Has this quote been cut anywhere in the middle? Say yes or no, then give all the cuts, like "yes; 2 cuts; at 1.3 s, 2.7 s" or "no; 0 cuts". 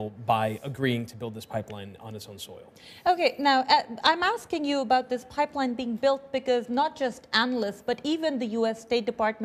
no; 0 cuts